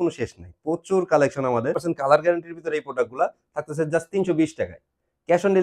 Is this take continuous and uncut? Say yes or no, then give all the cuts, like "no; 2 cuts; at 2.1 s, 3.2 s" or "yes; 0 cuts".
no; 1 cut; at 1.8 s